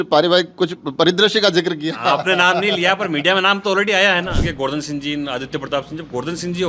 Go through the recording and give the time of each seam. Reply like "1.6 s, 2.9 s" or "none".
4.5 s